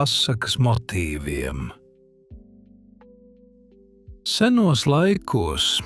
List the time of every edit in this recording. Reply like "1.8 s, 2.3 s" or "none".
1.8 s, 4.4 s